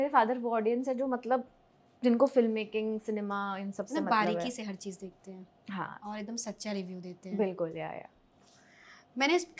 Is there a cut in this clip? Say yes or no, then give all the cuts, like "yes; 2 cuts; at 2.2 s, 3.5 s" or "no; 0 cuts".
no; 0 cuts